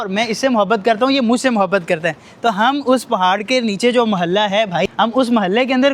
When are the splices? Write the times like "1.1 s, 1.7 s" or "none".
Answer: 4.9 s